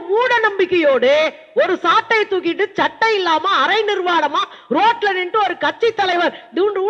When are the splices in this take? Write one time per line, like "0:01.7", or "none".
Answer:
none

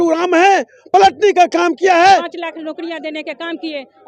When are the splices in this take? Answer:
0:02.3

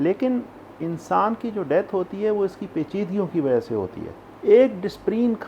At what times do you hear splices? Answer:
0:04.3

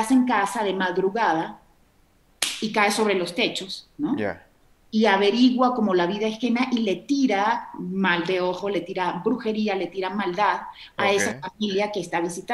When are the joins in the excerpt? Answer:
none

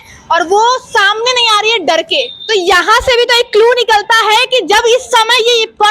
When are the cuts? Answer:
0:02.4

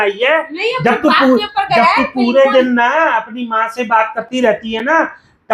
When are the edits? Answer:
none

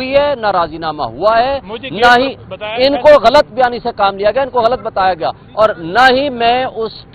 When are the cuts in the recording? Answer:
none

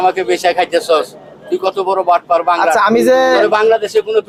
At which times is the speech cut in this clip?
none

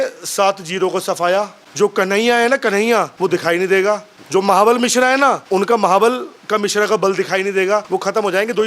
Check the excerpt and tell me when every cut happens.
0:01.6
0:03.1
0:04.1
0:05.4
0:07.9

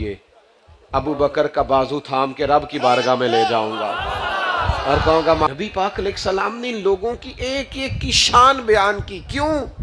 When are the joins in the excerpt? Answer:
0:05.5

